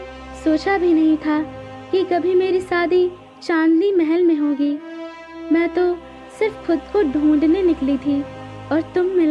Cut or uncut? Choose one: uncut